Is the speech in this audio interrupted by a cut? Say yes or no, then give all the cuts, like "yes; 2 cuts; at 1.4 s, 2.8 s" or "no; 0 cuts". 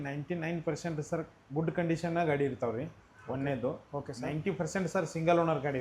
no; 0 cuts